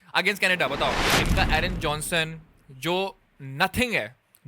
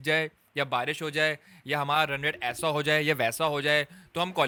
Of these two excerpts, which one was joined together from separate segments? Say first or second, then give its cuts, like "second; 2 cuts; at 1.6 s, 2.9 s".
first; 1 cut; at 1.1 s